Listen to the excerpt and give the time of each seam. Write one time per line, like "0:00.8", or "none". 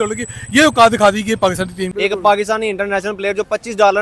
0:01.8